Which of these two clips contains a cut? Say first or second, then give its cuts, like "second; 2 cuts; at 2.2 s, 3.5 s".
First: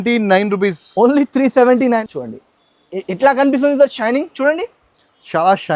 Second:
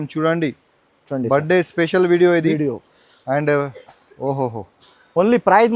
first; 1 cut; at 2.0 s